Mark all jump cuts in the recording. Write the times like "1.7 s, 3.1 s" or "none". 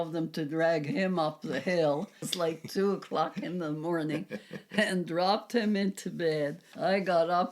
2.3 s, 6.6 s